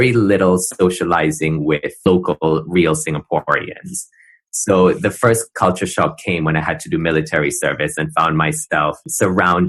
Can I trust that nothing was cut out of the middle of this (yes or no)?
yes